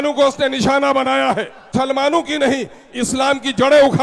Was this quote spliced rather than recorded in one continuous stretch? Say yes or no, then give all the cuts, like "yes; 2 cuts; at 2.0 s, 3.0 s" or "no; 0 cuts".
yes; 1 cut; at 1.7 s